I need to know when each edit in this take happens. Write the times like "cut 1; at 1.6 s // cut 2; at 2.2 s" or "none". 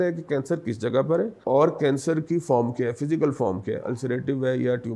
cut 1; at 1.4 s